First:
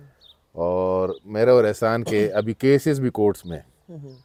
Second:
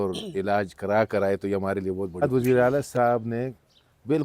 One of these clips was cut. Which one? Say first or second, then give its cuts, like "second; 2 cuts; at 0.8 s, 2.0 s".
second; 1 cut; at 2.2 s